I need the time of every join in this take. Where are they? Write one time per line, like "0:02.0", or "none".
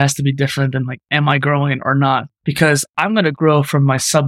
0:02.4